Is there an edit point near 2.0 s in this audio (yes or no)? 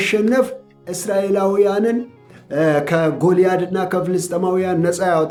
no